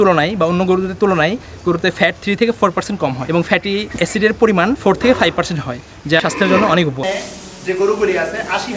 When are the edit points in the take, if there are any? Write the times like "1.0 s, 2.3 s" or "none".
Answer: 7.0 s